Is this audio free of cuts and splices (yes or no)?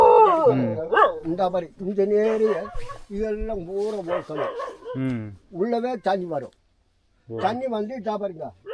yes